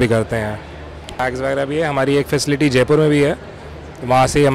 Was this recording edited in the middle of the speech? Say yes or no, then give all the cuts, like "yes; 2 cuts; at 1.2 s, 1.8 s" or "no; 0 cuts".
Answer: yes; 1 cut; at 1.2 s